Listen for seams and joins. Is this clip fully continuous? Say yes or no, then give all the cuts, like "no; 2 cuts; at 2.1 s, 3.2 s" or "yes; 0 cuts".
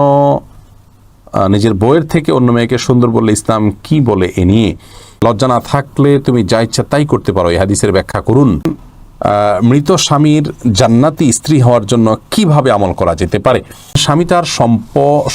no; 3 cuts; at 5.2 s, 8.8 s, 14.0 s